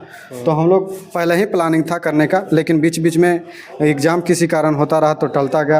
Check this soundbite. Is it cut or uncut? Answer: uncut